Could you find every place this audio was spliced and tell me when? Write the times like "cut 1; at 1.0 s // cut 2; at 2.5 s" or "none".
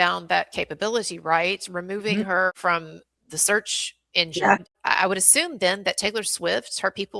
cut 1; at 2.5 s // cut 2; at 4.8 s